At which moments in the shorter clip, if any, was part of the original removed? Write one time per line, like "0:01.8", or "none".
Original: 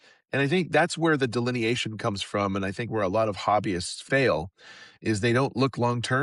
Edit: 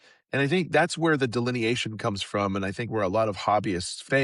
none

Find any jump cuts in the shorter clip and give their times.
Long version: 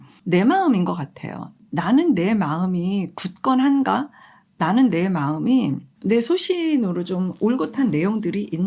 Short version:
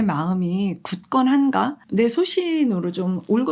0:01.8

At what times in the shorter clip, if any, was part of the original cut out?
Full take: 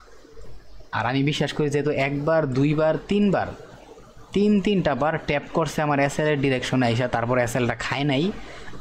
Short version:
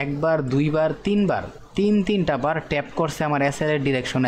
0:01.6

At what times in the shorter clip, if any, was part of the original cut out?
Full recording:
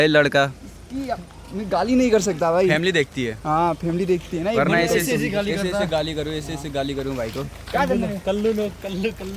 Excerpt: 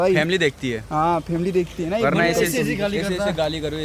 none

